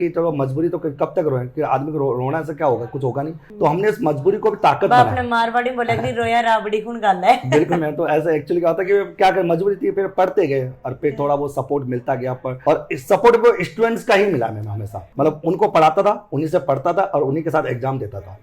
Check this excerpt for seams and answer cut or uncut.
uncut